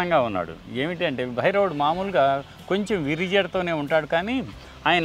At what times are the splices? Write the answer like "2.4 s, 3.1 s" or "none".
none